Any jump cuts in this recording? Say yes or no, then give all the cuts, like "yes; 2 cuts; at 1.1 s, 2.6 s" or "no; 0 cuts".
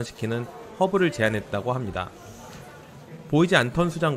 no; 0 cuts